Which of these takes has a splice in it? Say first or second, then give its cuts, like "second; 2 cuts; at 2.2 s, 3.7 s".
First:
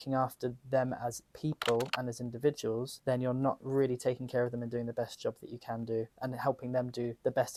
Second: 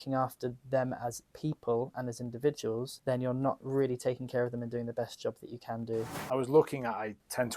second; 1 cut; at 6.1 s